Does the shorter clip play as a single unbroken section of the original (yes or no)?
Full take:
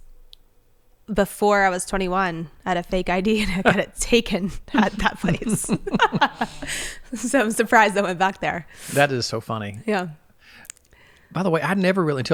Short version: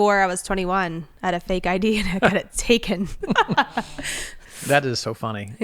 no